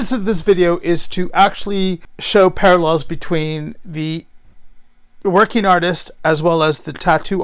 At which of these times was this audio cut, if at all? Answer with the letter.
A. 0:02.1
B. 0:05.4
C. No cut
A